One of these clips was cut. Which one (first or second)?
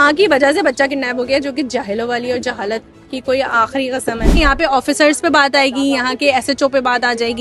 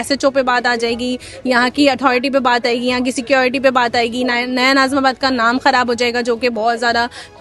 first